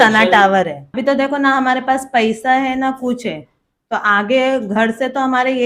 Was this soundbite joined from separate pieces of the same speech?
yes; 1 cut; at 1.0 s

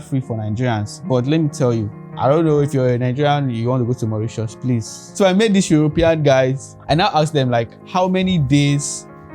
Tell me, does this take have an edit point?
yes; 4 cuts; at 2.0 s, 5.0 s, 6.7 s, 7.8 s

